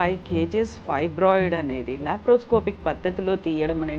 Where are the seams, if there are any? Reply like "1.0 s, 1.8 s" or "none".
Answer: none